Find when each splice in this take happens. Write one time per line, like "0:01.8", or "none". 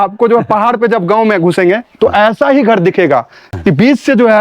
0:03.4